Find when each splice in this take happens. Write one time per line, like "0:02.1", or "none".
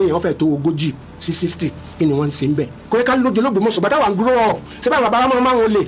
0:02.8

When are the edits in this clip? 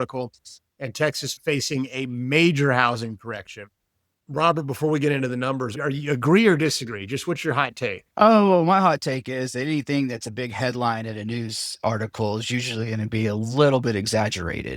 0:01.3

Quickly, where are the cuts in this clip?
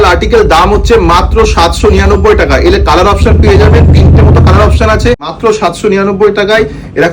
0:05.3

